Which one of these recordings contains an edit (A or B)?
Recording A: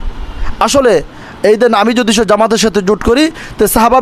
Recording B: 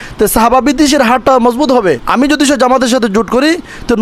B